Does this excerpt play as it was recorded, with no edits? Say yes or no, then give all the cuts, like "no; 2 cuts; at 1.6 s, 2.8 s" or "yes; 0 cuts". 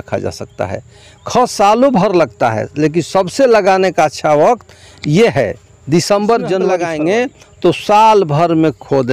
no; 1 cut; at 6.8 s